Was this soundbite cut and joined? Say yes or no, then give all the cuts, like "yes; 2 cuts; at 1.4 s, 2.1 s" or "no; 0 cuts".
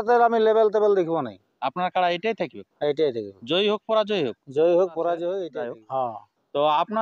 yes; 1 cut; at 5.5 s